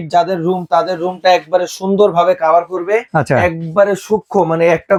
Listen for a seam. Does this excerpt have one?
no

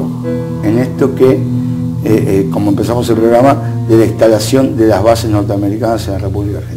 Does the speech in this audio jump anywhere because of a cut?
no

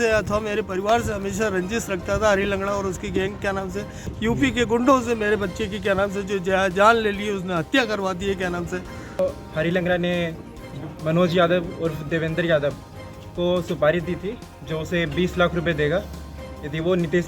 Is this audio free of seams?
no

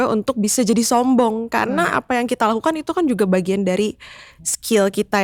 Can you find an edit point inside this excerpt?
no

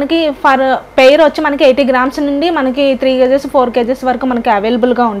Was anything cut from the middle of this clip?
no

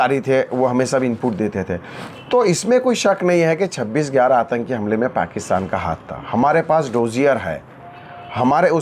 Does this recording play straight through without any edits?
yes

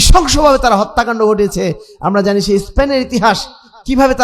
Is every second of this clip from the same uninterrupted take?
yes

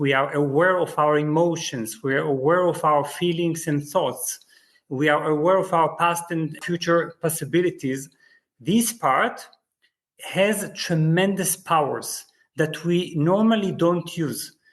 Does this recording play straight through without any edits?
no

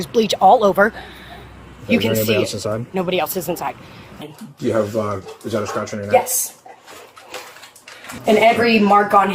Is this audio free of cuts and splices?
no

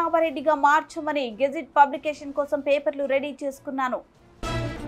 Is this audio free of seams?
yes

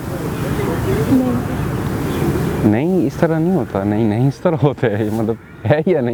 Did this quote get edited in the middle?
no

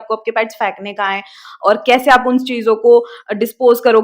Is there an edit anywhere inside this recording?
no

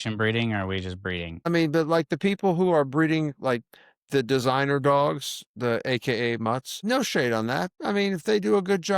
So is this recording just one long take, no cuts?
no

